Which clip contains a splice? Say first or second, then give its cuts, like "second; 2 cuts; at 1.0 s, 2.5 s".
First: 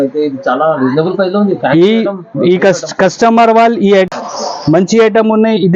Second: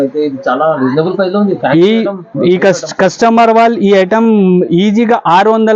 first; 1 cut; at 4.1 s